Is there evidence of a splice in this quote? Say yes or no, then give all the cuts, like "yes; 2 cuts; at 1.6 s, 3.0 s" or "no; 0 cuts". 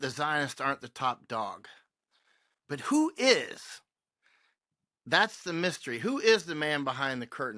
no; 0 cuts